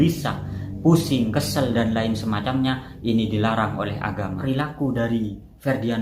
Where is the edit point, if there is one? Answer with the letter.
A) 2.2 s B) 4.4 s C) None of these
B